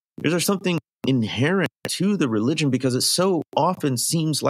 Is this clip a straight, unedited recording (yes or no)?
no